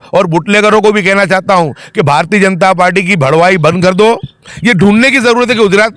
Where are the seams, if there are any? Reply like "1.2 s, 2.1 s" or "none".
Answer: 4.5 s